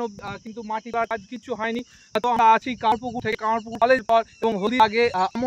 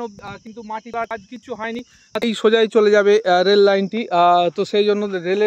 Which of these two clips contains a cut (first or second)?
second